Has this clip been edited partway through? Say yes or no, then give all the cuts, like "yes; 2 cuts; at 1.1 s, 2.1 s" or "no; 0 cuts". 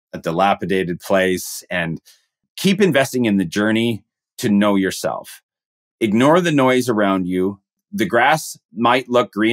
yes; 2 cuts; at 2.4 s, 7.7 s